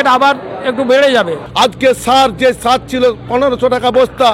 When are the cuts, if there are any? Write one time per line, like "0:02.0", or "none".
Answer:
0:01.4